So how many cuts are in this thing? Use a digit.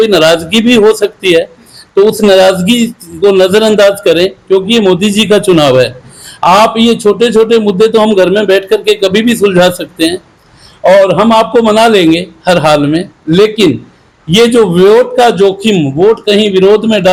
0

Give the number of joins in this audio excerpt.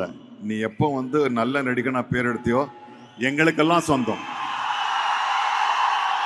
0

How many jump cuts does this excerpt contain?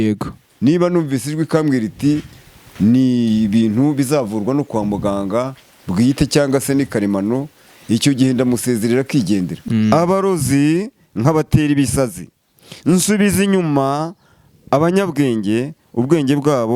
1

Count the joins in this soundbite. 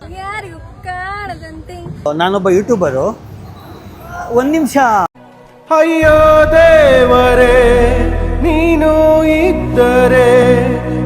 1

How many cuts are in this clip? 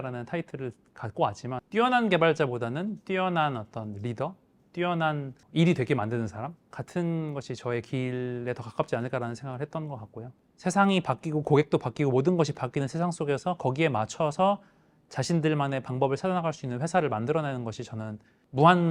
2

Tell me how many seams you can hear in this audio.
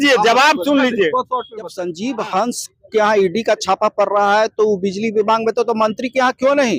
1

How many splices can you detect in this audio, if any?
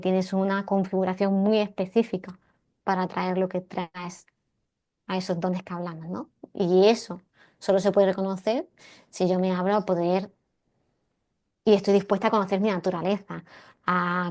0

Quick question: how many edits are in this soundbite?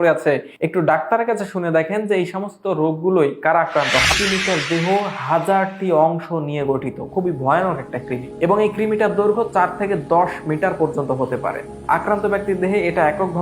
1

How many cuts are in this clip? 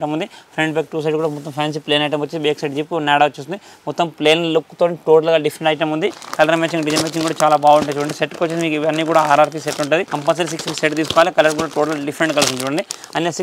0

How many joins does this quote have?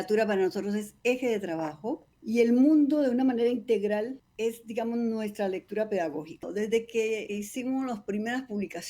4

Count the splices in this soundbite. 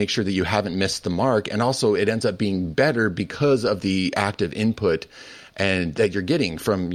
0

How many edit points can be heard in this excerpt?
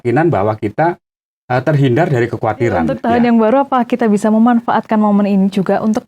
1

